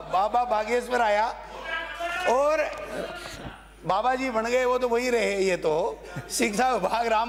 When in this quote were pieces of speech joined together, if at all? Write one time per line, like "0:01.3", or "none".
none